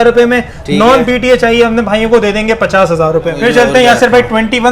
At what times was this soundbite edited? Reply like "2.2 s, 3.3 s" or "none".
3.3 s